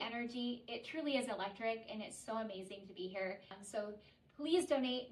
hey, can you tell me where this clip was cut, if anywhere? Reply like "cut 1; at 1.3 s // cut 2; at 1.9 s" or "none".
cut 1; at 3.5 s